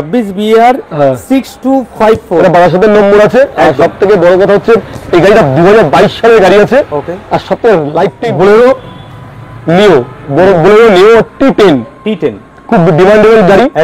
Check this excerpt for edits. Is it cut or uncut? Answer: cut